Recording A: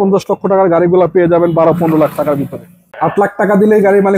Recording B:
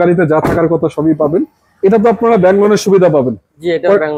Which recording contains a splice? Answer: A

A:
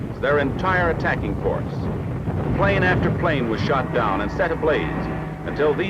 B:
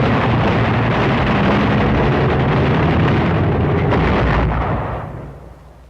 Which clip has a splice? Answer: A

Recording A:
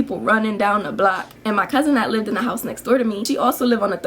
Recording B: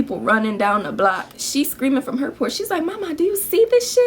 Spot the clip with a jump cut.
B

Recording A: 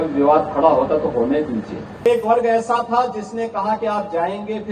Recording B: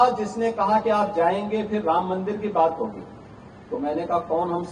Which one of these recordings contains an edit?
A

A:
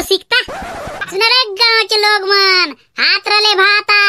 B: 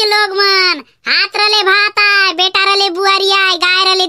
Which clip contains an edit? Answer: A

